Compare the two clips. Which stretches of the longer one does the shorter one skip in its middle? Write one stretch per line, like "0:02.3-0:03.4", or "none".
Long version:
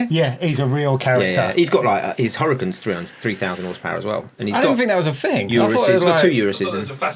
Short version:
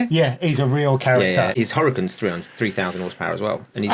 0:01.5-0:02.2